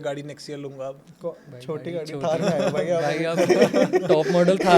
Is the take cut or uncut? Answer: uncut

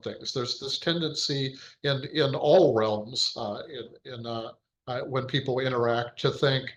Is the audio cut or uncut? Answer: uncut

